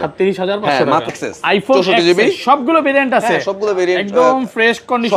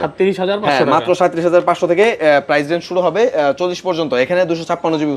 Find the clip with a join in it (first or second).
first